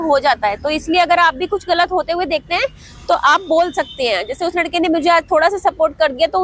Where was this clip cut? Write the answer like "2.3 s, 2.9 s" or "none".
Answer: none